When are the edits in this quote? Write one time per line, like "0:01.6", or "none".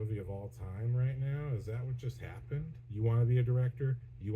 0:02.8